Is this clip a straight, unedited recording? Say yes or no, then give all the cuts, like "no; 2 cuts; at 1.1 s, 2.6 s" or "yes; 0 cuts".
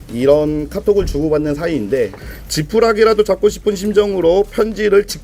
no; 1 cut; at 2.2 s